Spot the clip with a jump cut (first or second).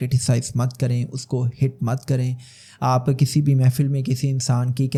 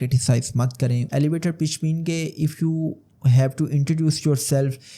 second